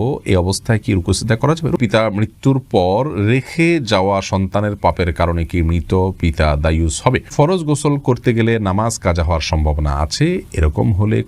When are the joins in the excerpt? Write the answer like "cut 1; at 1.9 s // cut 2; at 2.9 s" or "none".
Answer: cut 1; at 1.7 s // cut 2; at 7.3 s